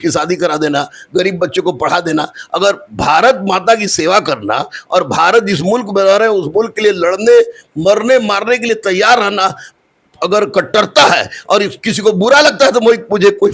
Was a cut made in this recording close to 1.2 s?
no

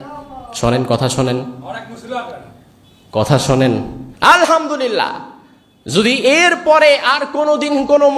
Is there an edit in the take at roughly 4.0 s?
yes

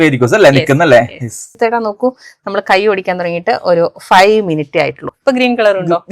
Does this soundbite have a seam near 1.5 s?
yes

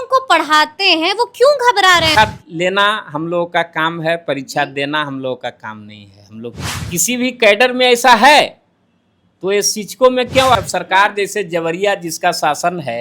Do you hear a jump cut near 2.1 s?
yes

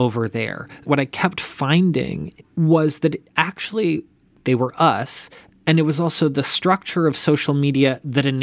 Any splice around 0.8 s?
yes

